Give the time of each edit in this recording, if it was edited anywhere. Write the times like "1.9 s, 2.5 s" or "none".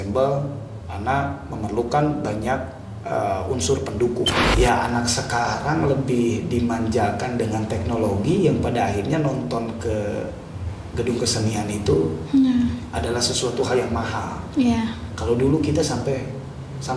4.4 s